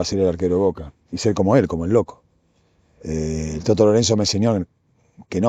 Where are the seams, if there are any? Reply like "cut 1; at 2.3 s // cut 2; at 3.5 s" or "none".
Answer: none